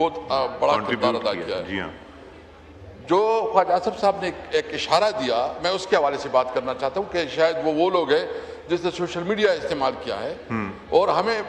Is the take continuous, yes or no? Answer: yes